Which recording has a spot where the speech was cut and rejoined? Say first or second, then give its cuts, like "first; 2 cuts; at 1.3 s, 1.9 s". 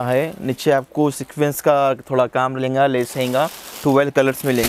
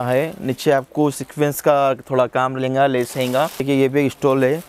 second; 1 cut; at 3.6 s